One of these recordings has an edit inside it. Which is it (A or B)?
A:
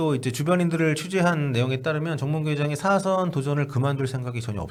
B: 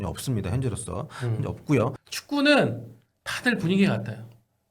B